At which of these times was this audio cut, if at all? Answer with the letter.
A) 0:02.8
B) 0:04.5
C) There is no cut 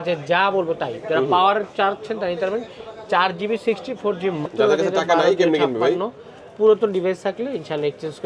B